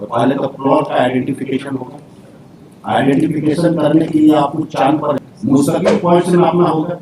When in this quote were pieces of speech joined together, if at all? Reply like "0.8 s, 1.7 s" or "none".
5.2 s